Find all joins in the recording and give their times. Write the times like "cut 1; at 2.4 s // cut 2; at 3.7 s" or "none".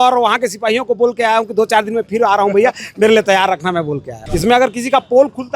cut 1; at 4.2 s